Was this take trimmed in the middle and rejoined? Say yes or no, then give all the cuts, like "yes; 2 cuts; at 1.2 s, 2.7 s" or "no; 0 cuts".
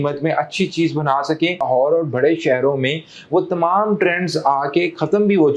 yes; 1 cut; at 1.6 s